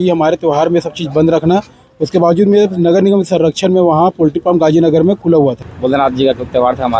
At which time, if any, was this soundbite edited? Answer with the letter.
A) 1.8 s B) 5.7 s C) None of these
B